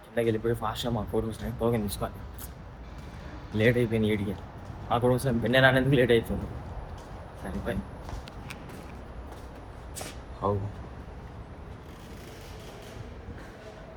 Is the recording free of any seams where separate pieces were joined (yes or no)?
yes